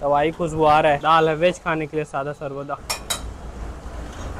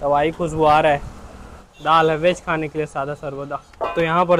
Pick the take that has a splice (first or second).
first